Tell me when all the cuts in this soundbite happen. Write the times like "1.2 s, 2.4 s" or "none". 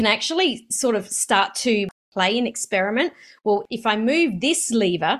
1.9 s, 3.6 s